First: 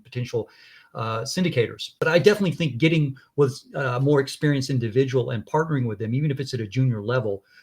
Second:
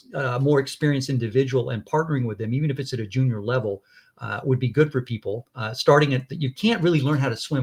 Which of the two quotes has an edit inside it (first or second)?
first